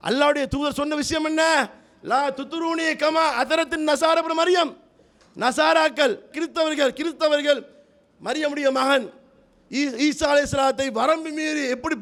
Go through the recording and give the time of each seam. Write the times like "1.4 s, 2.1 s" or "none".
none